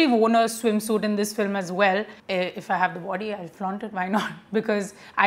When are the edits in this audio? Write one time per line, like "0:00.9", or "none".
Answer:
none